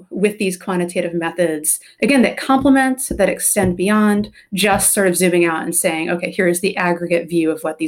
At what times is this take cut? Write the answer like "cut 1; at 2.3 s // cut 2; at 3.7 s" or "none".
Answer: cut 1; at 1.9 s